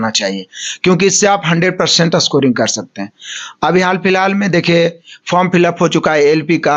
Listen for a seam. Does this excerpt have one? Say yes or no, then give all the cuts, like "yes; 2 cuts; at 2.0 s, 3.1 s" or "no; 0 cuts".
no; 0 cuts